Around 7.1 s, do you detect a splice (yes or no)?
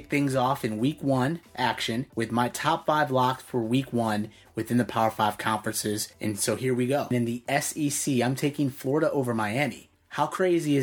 yes